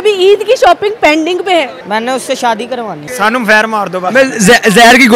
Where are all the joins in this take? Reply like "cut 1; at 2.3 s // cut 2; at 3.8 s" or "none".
cut 1; at 1.8 s // cut 2; at 3.1 s